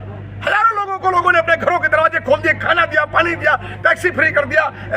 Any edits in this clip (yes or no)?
no